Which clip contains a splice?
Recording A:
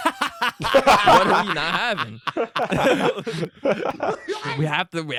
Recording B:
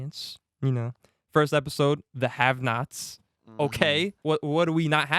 B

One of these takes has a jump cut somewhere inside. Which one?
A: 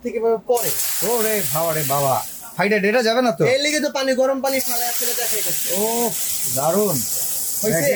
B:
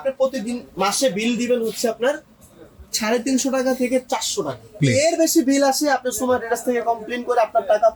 B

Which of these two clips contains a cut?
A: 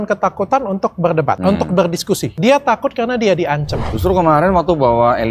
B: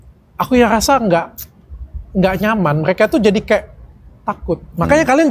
A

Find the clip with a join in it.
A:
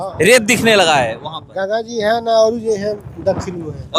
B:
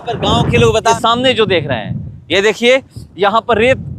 B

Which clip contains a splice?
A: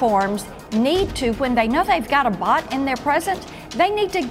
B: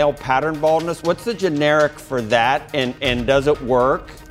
B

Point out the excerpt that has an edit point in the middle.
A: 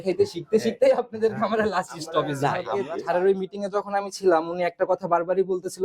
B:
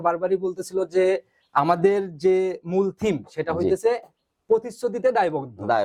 A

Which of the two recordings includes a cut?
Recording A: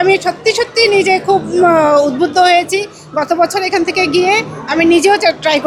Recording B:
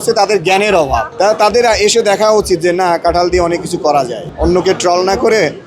B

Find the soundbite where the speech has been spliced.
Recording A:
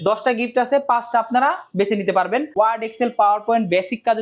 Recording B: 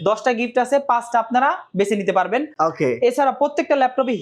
A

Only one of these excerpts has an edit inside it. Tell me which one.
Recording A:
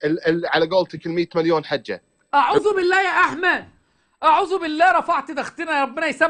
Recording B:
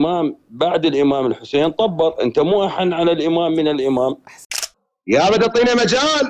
B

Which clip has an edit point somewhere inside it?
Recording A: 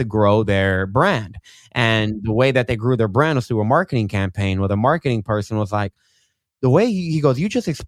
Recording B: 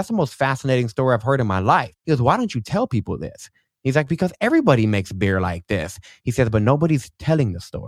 B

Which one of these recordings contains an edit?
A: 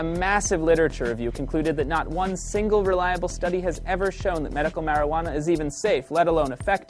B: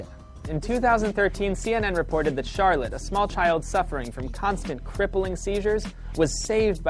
B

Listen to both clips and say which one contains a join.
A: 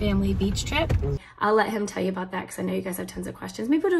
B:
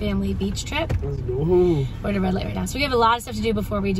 A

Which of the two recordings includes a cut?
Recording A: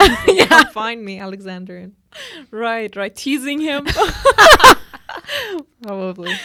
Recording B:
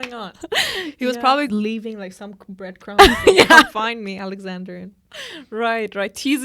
B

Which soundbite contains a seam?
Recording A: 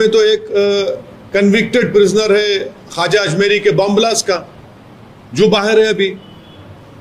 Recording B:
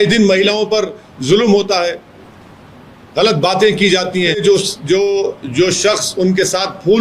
B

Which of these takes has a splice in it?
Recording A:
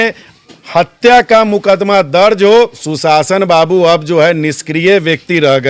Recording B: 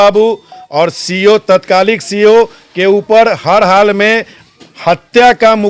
A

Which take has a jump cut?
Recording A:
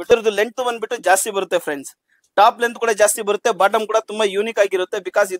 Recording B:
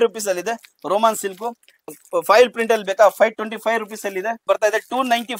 B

